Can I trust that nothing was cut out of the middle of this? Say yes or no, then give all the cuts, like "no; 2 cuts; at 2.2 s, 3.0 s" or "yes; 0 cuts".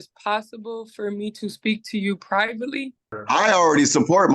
no; 1 cut; at 3.1 s